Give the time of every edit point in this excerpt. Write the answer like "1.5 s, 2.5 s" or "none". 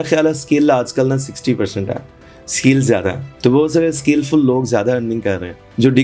none